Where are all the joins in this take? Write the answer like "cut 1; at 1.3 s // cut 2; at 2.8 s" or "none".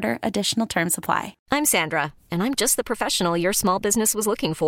cut 1; at 1.3 s